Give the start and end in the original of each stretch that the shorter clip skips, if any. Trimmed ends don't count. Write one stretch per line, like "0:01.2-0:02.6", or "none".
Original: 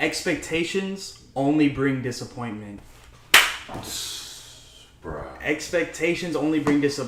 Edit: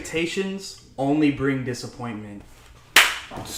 none